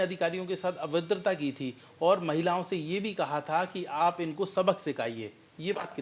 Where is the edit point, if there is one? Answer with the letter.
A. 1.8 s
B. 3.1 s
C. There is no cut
C